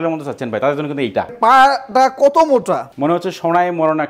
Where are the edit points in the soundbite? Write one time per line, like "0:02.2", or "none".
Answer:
0:01.3
0:02.9